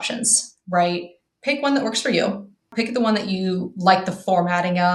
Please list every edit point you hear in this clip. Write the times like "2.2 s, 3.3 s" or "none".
2.7 s